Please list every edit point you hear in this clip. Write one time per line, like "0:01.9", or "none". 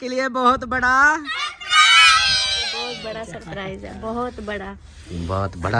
0:02.9